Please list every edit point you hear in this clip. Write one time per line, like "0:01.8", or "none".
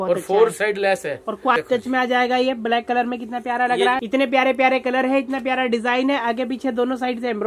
0:01.6
0:04.0